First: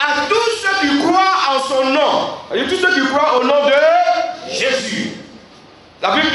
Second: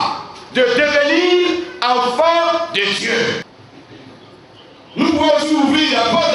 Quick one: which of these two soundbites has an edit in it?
second; 1 cut; at 3.4 s

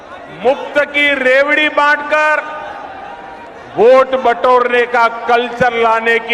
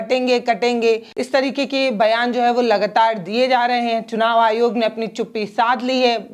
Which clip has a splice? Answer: second; 1 cut; at 1.1 s

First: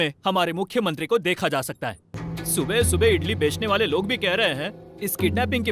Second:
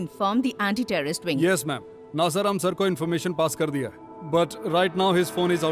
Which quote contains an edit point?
first; 1 cut; at 2.2 s

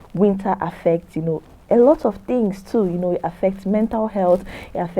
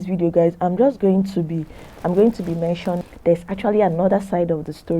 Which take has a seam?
second; 1 cut; at 3.0 s

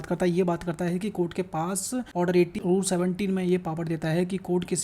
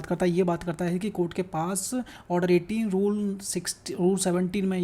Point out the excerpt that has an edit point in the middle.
first; 1 cut; at 2.3 s

